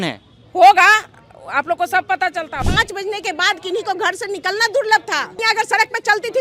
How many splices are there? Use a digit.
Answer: 2